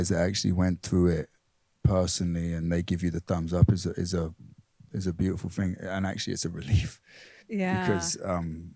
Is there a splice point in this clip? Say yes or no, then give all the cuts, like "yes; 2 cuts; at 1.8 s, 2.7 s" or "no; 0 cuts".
no; 0 cuts